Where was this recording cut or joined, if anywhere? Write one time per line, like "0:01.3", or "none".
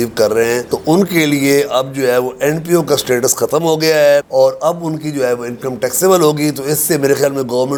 none